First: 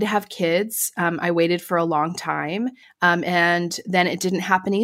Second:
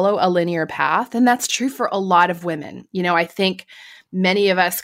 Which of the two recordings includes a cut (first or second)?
first